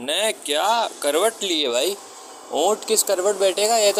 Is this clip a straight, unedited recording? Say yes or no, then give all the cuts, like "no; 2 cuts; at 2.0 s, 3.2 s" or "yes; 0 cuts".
yes; 0 cuts